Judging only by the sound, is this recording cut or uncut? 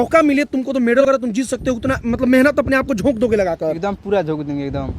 cut